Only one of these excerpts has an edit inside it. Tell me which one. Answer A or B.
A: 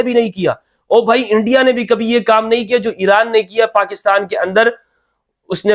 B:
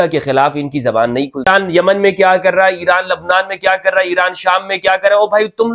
B